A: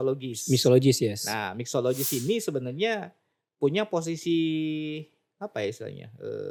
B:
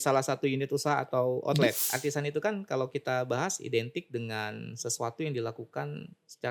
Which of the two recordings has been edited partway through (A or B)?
B